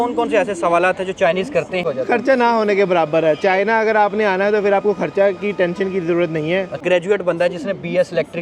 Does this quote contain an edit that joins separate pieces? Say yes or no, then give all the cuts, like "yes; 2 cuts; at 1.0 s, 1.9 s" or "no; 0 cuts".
yes; 2 cuts; at 1.8 s, 6.8 s